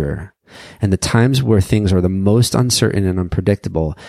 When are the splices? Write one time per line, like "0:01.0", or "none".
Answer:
none